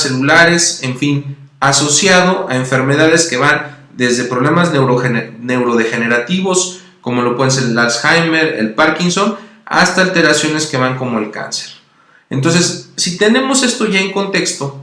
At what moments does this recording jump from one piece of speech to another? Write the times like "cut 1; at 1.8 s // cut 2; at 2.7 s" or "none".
cut 1; at 6.0 s